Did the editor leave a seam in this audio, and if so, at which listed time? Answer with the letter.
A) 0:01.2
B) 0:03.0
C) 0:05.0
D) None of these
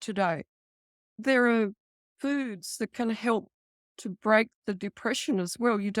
A